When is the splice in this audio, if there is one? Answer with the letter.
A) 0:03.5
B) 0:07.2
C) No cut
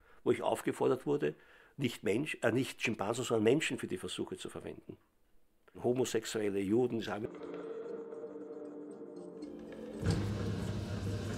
C